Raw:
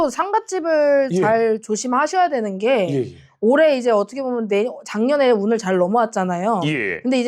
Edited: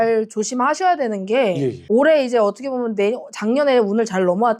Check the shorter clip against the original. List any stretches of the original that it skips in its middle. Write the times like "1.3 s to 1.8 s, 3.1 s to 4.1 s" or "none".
3.1 s to 3.3 s